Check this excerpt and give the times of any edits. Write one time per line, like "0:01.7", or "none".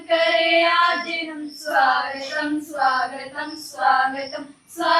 none